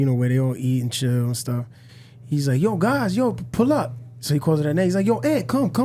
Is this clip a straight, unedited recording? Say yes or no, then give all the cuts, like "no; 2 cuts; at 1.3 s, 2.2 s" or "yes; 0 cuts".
yes; 0 cuts